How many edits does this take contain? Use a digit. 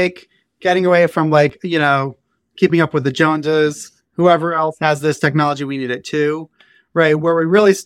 0